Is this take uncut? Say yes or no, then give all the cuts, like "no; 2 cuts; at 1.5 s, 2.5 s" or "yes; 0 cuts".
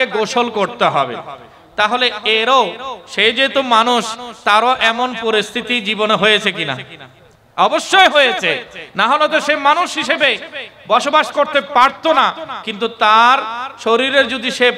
yes; 0 cuts